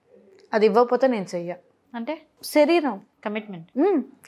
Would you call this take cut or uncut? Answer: uncut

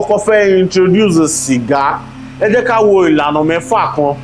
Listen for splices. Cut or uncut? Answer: uncut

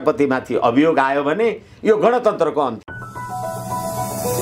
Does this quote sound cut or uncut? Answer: cut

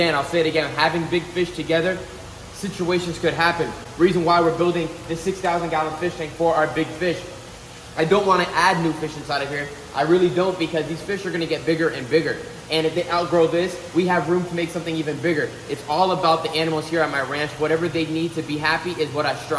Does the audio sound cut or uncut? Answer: uncut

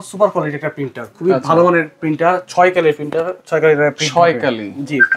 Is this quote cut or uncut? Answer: uncut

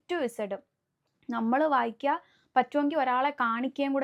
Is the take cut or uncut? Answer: uncut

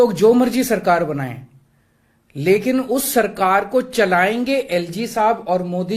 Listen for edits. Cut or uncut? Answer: uncut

